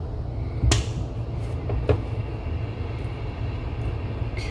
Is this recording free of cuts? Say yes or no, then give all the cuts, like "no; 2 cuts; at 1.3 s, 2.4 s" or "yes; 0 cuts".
yes; 0 cuts